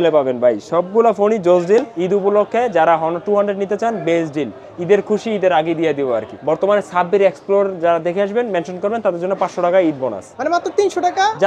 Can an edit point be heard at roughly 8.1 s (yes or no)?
no